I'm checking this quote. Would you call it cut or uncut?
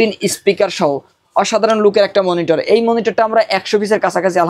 uncut